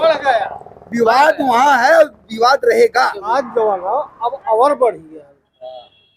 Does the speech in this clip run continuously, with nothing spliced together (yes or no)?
no